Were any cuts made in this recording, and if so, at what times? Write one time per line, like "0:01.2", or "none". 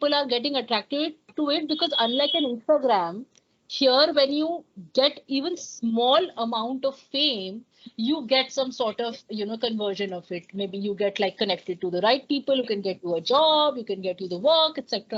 none